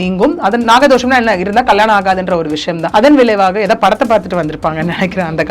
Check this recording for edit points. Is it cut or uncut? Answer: cut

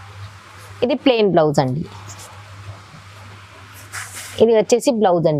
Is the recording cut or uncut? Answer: uncut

